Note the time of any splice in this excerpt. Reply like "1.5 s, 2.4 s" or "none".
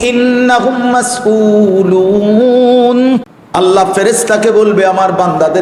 3.4 s